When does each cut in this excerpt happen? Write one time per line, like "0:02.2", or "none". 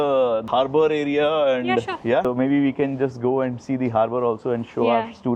none